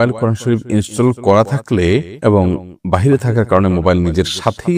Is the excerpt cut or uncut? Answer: cut